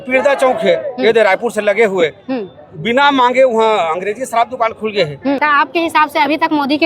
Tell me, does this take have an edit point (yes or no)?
yes